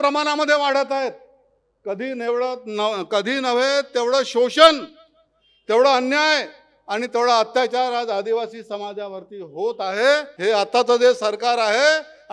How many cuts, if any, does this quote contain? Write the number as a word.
one